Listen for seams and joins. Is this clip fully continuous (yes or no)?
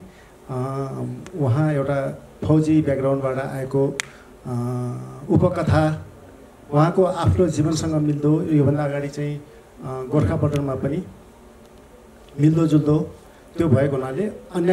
yes